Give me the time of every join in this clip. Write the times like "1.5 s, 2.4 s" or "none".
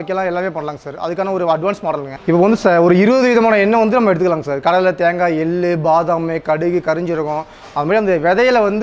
2.1 s